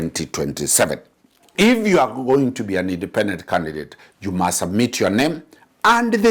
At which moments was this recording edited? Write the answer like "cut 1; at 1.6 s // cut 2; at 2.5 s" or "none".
cut 1; at 1.5 s